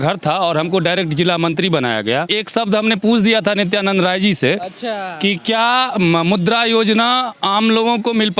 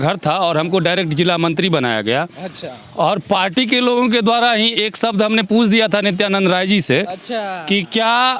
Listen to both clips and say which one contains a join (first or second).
first